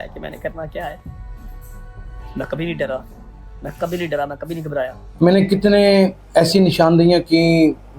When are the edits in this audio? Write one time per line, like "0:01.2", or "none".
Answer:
0:05.0